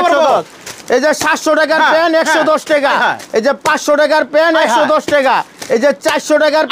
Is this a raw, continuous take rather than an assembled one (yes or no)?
yes